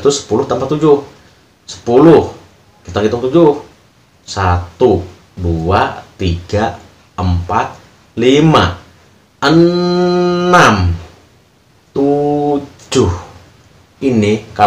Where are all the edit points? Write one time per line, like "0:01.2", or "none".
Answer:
none

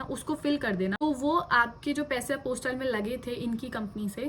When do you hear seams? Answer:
0:01.0

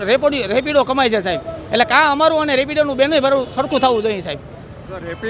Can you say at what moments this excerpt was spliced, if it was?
none

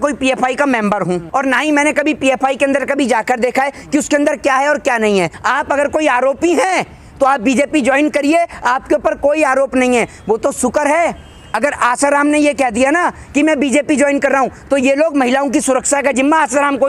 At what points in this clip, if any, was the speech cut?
0:01.2
0:05.4

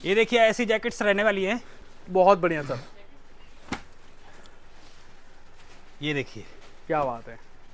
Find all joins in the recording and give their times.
none

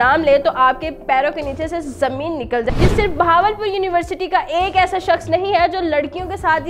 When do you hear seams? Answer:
0:02.7

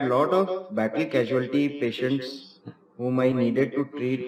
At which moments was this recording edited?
none

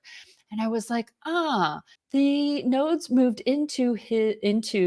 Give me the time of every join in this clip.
0:01.9

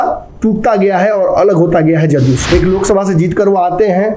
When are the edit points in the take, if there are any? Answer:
0:02.4

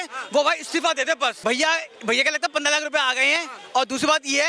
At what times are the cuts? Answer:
0:01.4

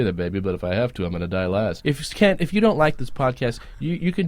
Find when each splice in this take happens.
0:01.8

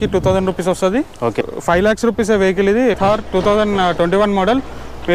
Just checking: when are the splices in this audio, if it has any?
0:01.5
0:03.0

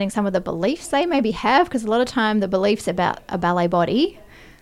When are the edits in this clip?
none

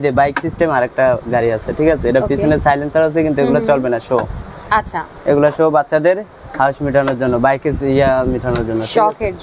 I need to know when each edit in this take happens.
none

